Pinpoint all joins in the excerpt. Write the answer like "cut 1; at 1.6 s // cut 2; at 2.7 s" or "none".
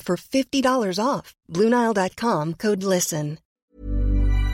cut 1; at 3.6 s